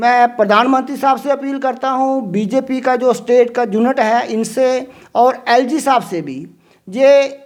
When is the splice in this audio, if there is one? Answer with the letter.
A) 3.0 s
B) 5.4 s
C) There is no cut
C